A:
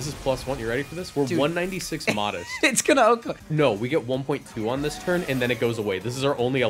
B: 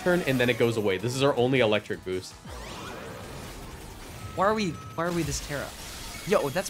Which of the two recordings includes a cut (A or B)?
A